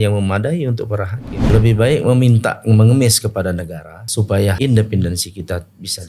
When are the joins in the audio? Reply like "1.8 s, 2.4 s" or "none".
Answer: 1.5 s, 4.5 s